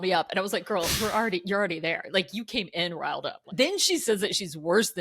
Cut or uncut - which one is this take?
cut